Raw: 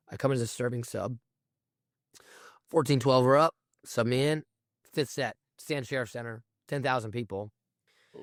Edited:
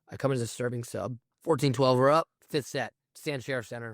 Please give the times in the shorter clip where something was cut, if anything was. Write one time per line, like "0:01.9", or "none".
0:01.3
0:02.4